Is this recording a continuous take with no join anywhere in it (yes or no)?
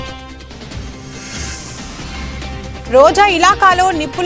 no